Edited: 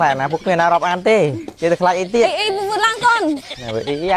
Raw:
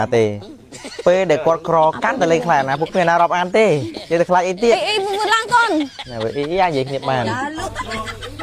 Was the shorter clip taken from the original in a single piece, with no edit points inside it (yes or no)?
yes